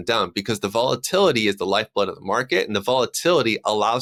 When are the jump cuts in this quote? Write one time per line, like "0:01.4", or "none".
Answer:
none